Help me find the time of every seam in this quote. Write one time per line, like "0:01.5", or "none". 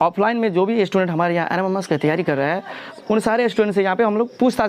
0:02.9